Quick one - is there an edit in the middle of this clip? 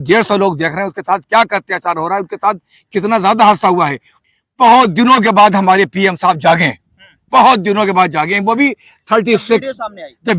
yes; 1 cut; at 4.2 s

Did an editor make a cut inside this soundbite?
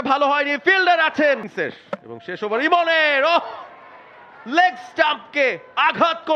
yes; 1 cut; at 1.5 s

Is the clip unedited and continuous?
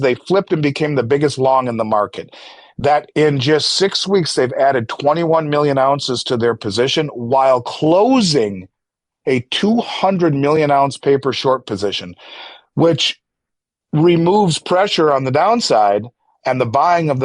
yes; 0 cuts

